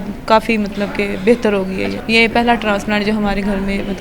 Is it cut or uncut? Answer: cut